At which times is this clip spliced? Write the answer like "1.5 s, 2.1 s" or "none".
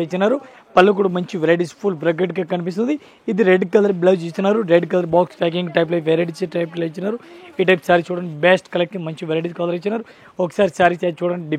none